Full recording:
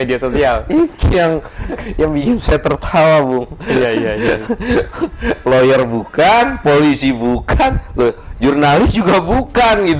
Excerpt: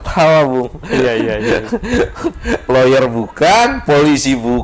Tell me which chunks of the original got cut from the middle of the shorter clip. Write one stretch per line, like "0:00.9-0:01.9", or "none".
none